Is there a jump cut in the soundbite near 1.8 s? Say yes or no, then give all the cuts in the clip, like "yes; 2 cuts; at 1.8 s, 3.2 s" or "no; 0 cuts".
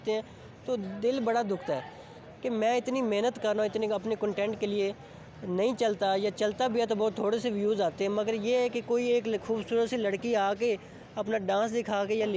yes; 1 cut; at 1.8 s